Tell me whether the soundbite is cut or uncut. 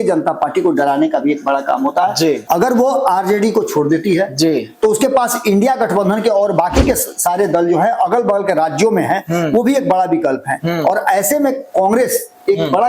cut